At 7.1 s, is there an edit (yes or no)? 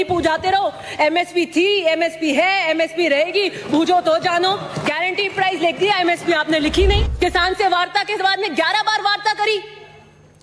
yes